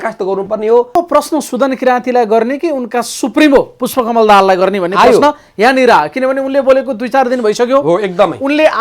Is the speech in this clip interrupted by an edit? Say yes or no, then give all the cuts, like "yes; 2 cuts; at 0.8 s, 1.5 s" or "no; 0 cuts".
yes; 1 cut; at 0.9 s